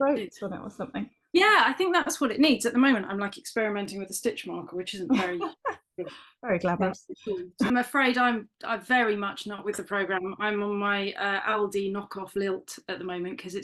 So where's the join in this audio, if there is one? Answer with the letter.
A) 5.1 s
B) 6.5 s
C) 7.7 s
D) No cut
C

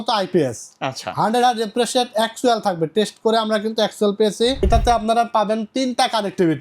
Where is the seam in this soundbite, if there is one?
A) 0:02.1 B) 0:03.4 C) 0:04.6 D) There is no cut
C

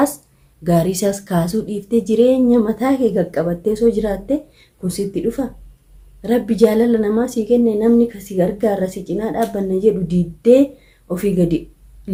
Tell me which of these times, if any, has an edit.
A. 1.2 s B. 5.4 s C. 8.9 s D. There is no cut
D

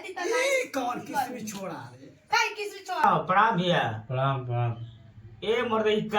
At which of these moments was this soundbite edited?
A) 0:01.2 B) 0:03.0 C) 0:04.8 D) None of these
B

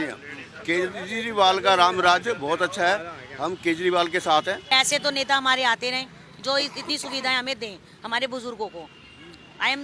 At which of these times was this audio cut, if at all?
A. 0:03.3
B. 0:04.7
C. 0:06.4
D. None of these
B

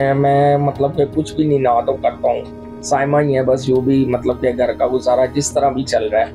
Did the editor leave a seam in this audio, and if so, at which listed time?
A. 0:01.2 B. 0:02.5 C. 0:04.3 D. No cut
D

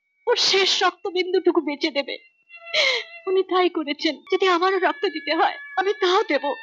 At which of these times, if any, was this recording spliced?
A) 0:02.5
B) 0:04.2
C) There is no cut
B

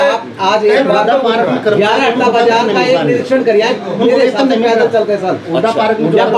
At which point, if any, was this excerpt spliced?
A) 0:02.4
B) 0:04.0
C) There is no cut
C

